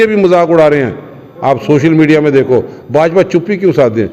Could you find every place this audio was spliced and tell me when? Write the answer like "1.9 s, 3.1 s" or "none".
none